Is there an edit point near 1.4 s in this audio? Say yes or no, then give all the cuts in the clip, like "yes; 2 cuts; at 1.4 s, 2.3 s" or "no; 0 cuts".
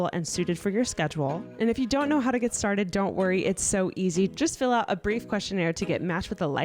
yes; 1 cut; at 1.4 s